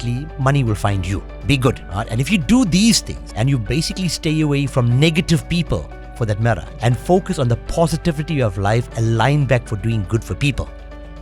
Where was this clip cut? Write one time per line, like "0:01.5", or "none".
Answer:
0:01.3
0:01.9
0:03.2
0:06.7